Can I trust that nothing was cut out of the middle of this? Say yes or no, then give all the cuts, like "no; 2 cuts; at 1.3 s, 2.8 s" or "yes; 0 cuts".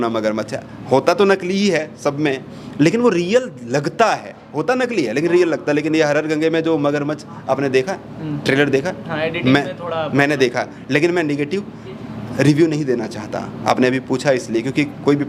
yes; 0 cuts